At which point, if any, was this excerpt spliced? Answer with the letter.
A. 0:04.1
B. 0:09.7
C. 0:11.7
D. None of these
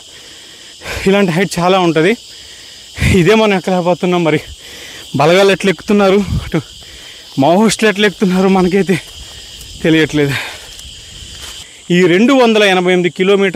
C